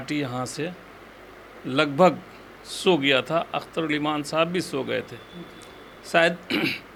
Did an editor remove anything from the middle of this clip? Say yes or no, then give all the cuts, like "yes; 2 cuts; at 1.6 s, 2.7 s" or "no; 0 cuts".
no; 0 cuts